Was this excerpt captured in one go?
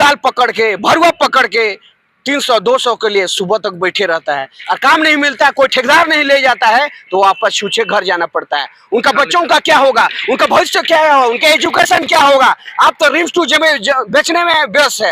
yes; 0 cuts

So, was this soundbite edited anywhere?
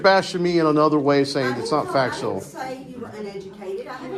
no; 0 cuts

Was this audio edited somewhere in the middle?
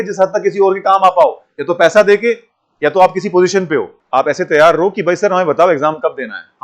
yes; 1 cut; at 4.0 s

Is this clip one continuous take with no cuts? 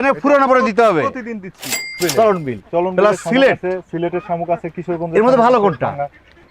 no; 1 cut; at 1.9 s

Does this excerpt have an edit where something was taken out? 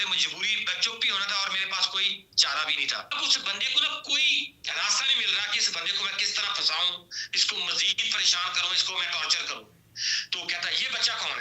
yes; 1 cut; at 3.1 s

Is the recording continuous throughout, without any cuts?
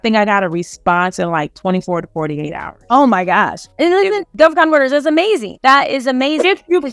yes; 0 cuts

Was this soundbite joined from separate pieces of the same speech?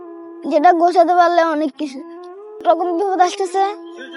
yes; 1 cut; at 2.6 s

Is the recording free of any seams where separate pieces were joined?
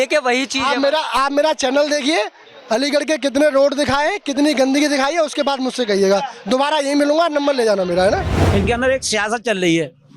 no; 1 cut; at 8.4 s

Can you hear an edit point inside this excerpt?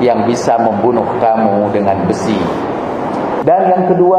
no; 0 cuts

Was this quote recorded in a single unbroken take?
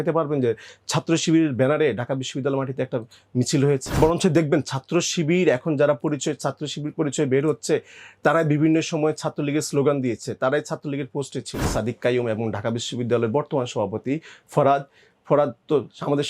no; 2 cuts; at 4.0 s, 11.7 s

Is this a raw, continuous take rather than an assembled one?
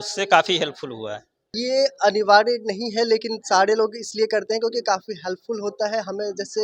no; 1 cut; at 1.5 s

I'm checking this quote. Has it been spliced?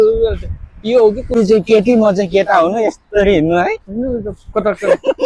yes; 2 cuts; at 1.4 s, 3.8 s

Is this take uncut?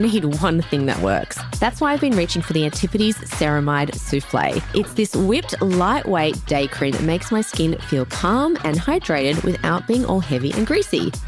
yes; 0 cuts

